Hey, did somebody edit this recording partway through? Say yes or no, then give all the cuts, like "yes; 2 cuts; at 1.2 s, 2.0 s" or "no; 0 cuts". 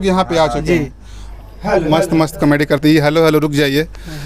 yes; 1 cut; at 1.2 s